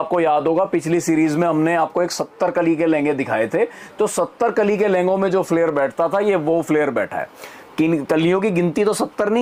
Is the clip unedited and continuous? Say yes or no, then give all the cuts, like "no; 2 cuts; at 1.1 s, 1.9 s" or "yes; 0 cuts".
yes; 0 cuts